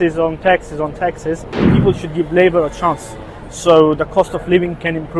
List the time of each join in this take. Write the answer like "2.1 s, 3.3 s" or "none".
1.7 s

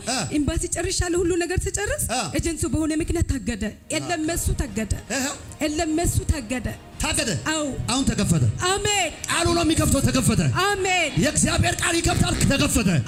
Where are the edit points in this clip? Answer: none

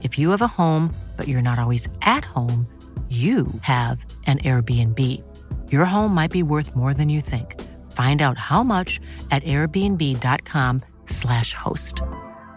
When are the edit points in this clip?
none

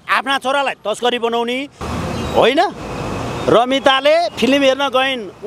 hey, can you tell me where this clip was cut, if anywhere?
1.8 s

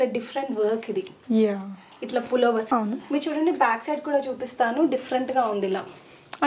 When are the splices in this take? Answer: 2.7 s

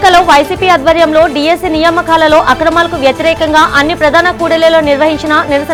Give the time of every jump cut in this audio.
none

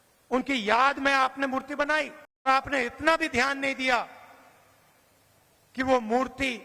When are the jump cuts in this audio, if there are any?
2.5 s

